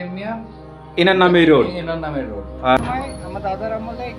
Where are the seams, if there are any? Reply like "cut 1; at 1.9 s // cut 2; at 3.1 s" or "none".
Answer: cut 1; at 2.8 s